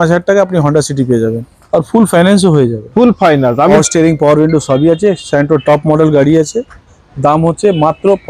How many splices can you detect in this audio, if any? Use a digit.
1